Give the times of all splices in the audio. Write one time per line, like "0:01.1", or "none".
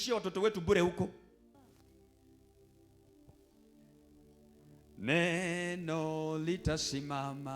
0:01.5

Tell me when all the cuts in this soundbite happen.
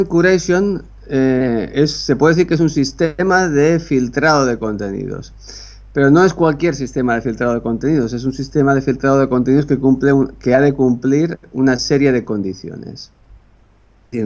none

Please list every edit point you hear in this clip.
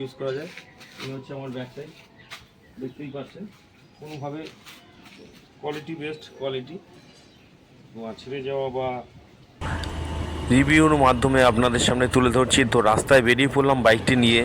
0:09.7

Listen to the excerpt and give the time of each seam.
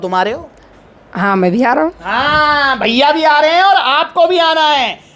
none

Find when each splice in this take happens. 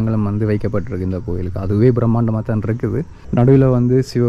0:03.2

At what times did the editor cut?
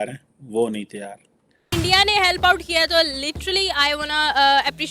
0:01.7

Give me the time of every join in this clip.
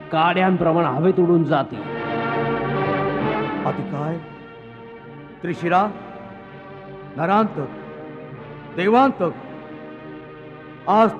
0:02.0

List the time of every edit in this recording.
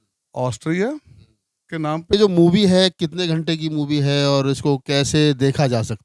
0:02.1

